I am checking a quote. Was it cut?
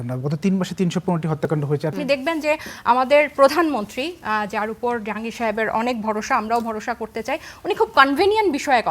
yes; 1 cut; at 1.9 s

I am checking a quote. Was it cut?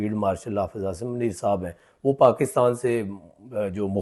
no; 0 cuts

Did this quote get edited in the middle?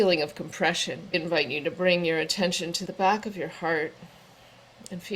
yes; 2 cuts; at 1.1 s, 2.8 s

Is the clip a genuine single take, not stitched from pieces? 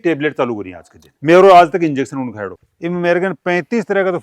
no; 2 cuts; at 1.1 s, 2.5 s

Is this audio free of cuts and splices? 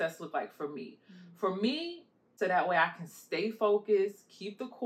no; 1 cut; at 2.3 s

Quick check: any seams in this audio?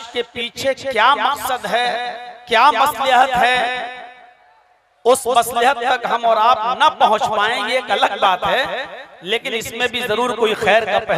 no; 0 cuts

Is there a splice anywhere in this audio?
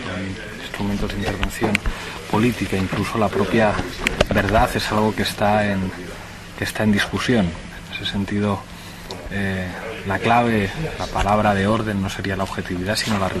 no; 0 cuts

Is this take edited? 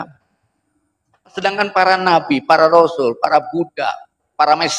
yes; 1 cut; at 1.4 s

